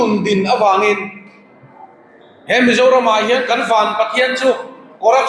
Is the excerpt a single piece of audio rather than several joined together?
yes; 0 cuts

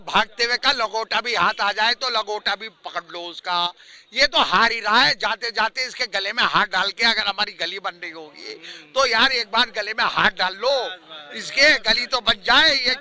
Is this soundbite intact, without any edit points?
yes; 0 cuts

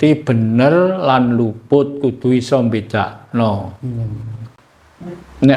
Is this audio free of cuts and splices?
yes; 0 cuts

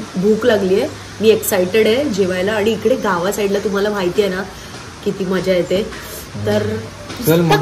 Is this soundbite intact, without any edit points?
yes; 0 cuts

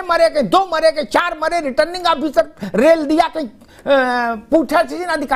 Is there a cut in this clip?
no; 0 cuts

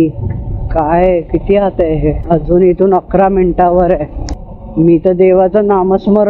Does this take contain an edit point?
yes; 1 cut; at 2.2 s

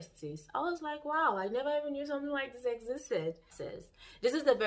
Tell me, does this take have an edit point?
yes; 1 cut; at 3.6 s

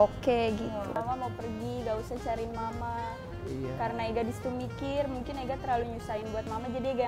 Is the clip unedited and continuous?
no; 1 cut; at 0.9 s

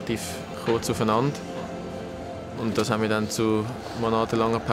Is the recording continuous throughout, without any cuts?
yes; 0 cuts

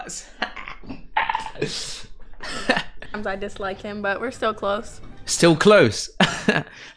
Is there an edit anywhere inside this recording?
yes; 1 cut; at 3.0 s

